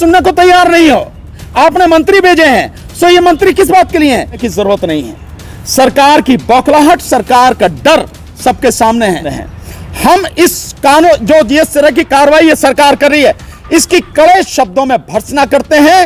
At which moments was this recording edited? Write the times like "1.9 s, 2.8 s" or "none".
4.4 s, 9.4 s